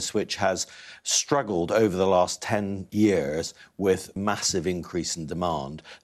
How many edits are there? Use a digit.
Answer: 2